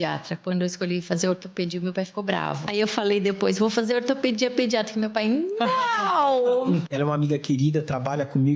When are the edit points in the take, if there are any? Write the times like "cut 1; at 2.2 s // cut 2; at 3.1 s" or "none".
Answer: cut 1; at 2.6 s // cut 2; at 6.8 s